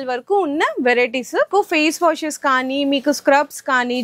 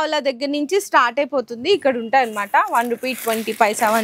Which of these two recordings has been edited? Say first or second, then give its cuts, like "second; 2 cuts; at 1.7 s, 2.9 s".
first; 1 cut; at 1.5 s